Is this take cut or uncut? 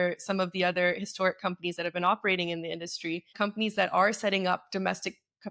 cut